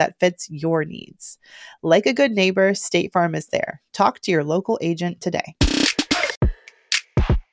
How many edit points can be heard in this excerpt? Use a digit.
1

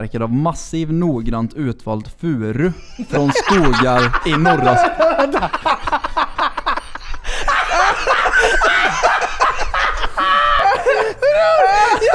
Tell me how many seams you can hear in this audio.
0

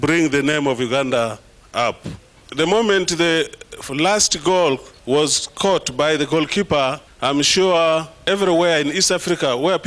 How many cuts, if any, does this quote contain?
4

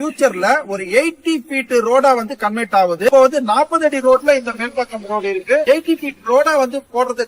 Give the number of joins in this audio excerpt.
0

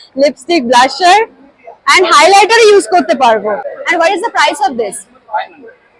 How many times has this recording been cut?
1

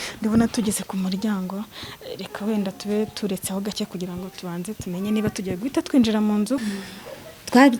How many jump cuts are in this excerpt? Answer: 1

